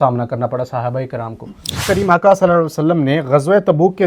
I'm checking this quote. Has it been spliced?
yes; 1 cut; at 1.9 s

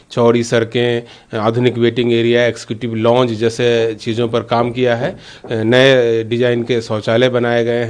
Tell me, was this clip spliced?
no; 0 cuts

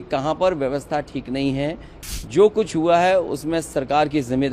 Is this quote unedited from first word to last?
no; 1 cut; at 1.9 s

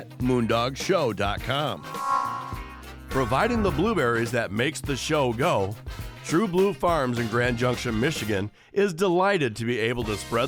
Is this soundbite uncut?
yes; 0 cuts

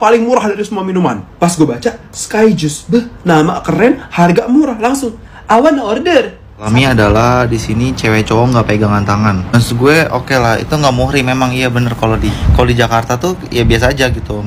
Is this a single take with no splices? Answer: no; 2 cuts; at 6.7 s, 12.4 s

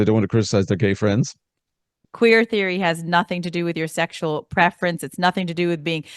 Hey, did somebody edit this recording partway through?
yes; 1 cut; at 1.9 s

